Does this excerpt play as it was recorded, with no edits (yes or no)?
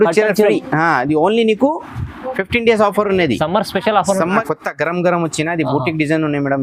no